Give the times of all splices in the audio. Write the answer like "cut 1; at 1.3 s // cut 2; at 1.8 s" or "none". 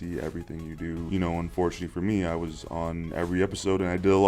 cut 1; at 1.1 s